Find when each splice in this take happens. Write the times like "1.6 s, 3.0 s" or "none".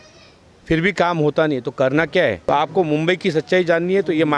2.4 s